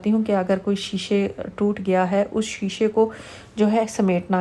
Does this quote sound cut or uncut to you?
uncut